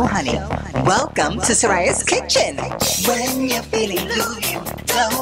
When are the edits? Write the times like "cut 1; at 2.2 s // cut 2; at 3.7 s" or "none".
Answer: none